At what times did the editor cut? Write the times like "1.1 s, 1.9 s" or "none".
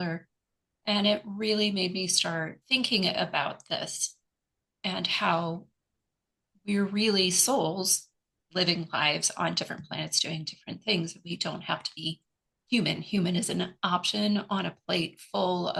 2.6 s